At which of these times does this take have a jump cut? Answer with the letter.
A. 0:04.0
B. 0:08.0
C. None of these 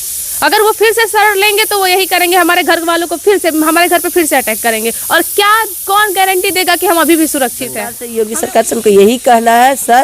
B